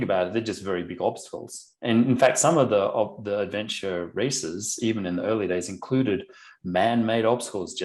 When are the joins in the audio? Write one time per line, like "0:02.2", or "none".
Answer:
none